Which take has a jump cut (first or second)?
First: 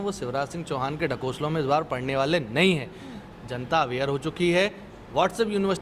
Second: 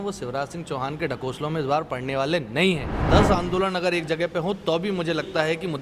second